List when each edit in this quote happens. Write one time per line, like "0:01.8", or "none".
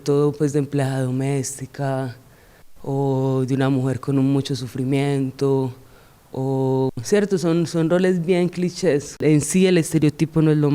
0:09.2